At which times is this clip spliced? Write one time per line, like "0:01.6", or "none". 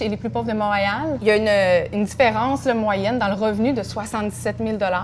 0:01.2